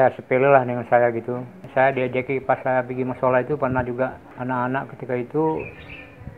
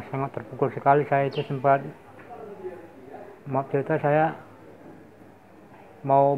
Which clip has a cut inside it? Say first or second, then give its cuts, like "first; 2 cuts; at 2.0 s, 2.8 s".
first; 2 cuts; at 1.6 s, 4.3 s